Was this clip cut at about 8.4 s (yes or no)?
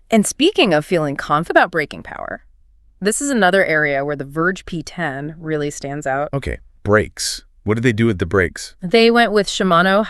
no